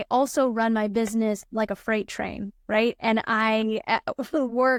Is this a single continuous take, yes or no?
yes